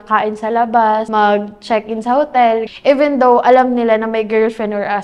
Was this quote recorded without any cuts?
no; 2 cuts; at 1.1 s, 2.7 s

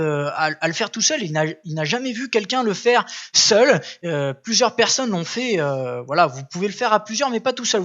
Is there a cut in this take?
no; 0 cuts

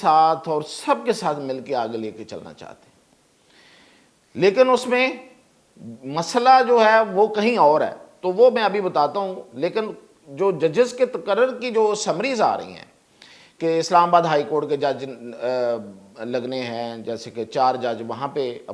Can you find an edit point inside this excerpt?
no; 0 cuts

